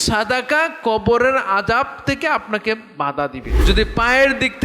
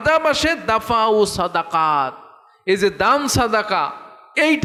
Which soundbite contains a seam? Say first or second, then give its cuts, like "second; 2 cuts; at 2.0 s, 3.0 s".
first; 1 cut; at 3.5 s